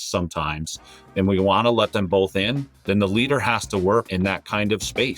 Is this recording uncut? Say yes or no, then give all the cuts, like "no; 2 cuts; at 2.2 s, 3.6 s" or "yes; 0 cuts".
no; 2 cuts; at 2.7 s, 4.1 s